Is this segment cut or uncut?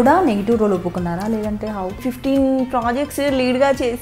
cut